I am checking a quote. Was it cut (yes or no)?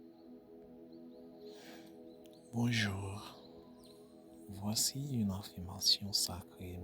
yes